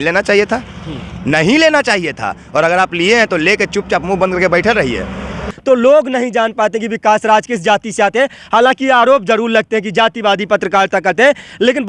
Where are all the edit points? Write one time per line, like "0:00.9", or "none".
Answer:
0:05.5